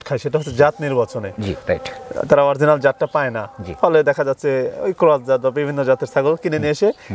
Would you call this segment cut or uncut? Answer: uncut